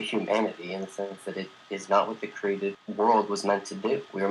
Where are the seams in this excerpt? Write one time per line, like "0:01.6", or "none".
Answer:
0:02.8